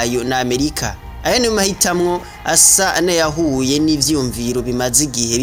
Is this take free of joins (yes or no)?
yes